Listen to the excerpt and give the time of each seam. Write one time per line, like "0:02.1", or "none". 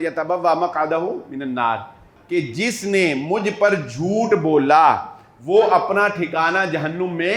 0:02.1